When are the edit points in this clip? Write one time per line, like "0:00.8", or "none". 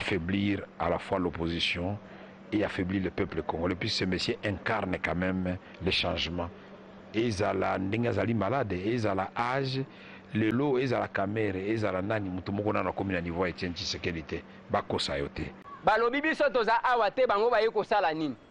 0:15.6